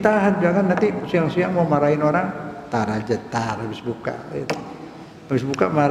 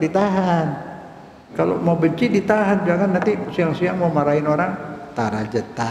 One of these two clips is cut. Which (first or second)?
second